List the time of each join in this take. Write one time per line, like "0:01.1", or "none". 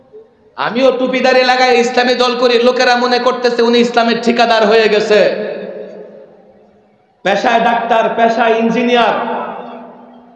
none